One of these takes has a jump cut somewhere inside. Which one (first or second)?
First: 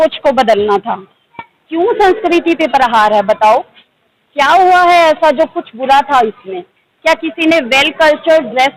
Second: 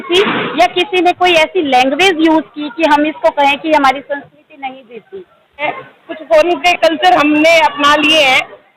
second